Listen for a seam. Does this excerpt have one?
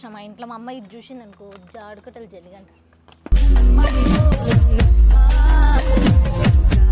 no; 0 cuts

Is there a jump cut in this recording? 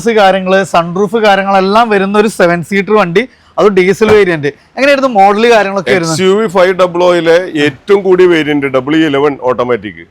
no; 0 cuts

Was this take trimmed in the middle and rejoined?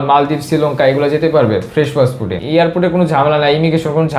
yes; 1 cut; at 2.4 s

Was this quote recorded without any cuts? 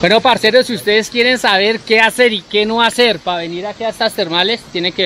yes; 0 cuts

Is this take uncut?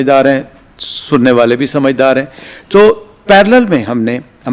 yes; 0 cuts

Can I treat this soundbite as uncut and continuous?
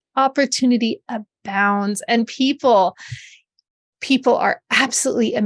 yes; 0 cuts

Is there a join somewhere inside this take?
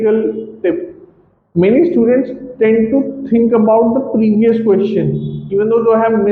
no; 0 cuts

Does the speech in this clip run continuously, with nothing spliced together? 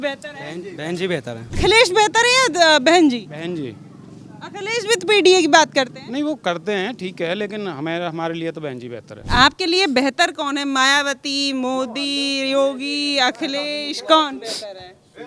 no; 2 cuts; at 1.6 s, 9.2 s

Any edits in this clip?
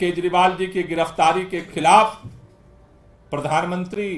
no; 0 cuts

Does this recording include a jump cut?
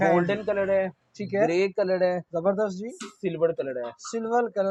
no; 0 cuts

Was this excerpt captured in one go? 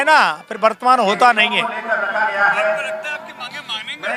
yes; 0 cuts

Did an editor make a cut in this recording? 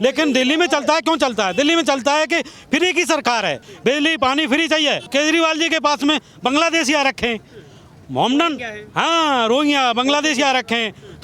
yes; 2 cuts; at 3.7 s, 5.1 s

